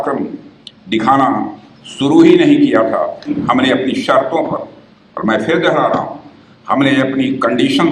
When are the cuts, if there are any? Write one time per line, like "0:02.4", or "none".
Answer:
0:03.4